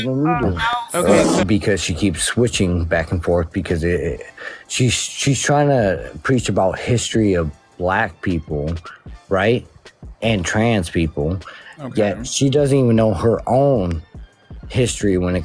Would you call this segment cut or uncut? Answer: cut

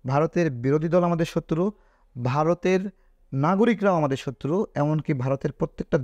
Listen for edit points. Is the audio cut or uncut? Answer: uncut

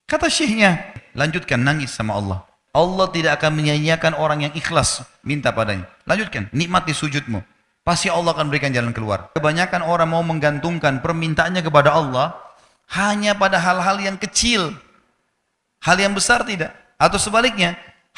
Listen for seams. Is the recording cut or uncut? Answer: cut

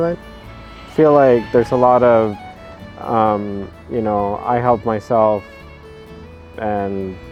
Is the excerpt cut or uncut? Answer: uncut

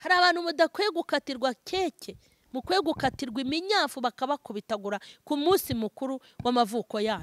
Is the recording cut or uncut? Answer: uncut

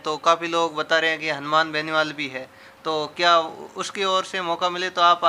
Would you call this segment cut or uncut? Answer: uncut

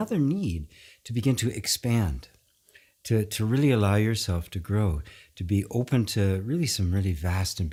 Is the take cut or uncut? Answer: uncut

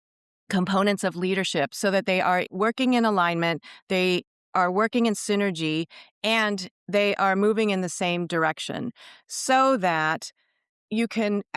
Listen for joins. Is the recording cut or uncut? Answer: cut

